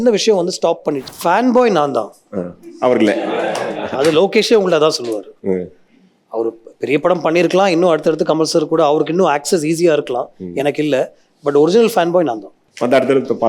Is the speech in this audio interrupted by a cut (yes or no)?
yes